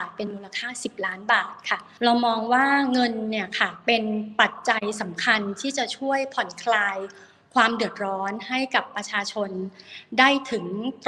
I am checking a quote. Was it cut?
yes; 1 cut; at 1.9 s

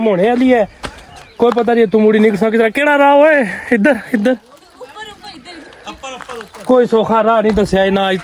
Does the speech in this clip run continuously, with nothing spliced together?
yes; 0 cuts

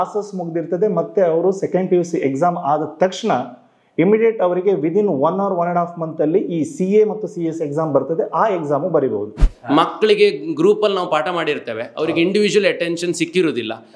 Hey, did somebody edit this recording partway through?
yes; 1 cut; at 9.5 s

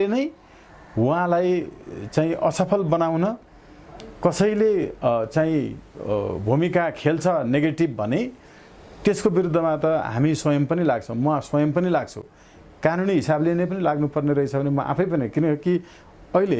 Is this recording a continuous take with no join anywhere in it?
yes; 0 cuts

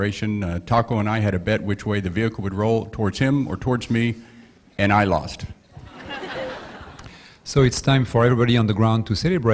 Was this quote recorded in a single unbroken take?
yes; 0 cuts

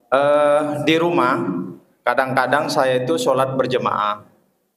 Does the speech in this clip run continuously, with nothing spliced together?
yes; 0 cuts

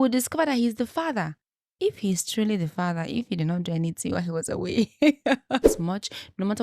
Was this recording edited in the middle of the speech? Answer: yes; 1 cut; at 5.7 s

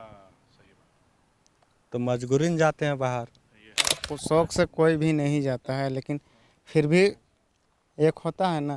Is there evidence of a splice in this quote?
yes; 1 cut; at 4.0 s

